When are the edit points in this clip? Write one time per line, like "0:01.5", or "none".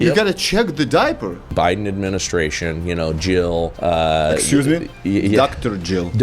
0:01.5
0:03.7

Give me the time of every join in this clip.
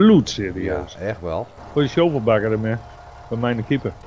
0:01.5

